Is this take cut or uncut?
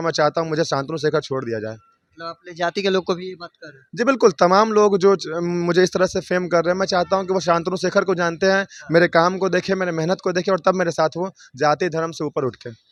uncut